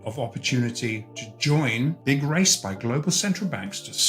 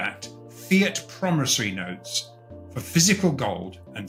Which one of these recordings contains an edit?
first; 1 cut; at 2.0 s

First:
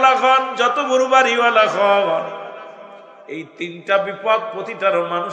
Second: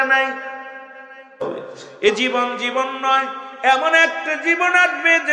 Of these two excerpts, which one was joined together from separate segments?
second; 1 cut; at 1.4 s

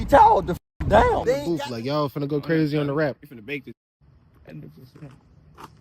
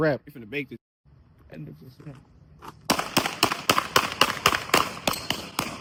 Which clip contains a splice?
first; 1 cut; at 1.6 s

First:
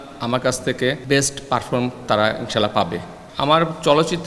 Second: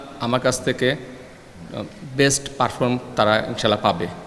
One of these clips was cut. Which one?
first; 2 cuts; at 1.0 s, 3.2 s

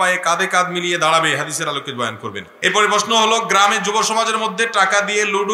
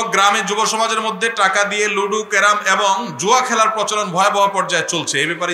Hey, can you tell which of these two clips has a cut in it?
first; 1 cut; at 2.5 s

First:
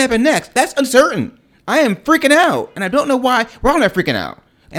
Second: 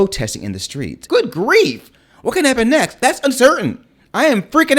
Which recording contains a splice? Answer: second; 1 cut; at 1.0 s

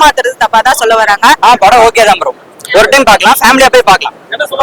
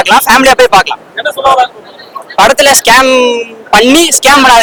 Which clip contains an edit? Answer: first; 1 cut; at 1.4 s

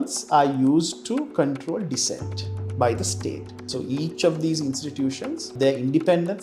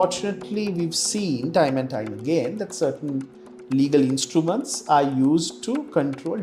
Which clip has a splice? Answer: first; 2 cuts; at 3.5 s, 5.5 s

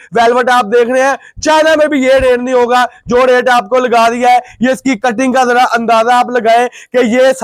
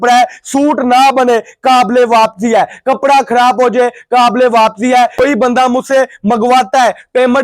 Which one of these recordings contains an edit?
second; 1 cut; at 5.1 s

